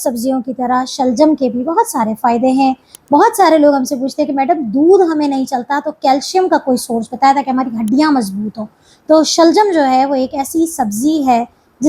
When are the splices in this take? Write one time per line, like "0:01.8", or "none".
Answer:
0:02.9